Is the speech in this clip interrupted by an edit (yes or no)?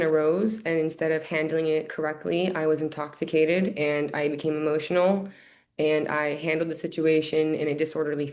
no